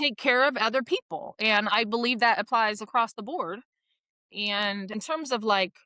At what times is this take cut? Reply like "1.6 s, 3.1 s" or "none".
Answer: 4.9 s